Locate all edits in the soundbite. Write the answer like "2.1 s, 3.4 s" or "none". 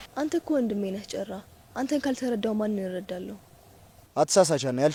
none